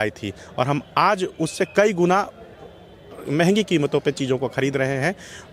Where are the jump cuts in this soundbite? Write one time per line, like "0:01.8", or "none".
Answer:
none